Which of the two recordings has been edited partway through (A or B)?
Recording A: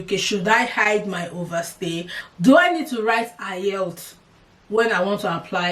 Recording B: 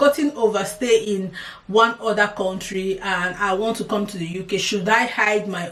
A